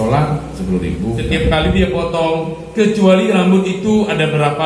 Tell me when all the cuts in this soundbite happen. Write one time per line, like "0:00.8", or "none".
0:01.3